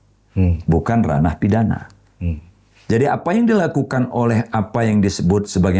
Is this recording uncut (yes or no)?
yes